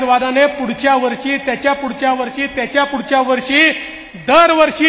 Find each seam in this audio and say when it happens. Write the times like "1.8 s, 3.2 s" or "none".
none